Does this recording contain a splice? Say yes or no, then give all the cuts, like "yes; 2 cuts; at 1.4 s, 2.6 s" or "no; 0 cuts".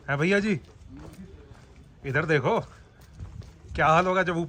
no; 0 cuts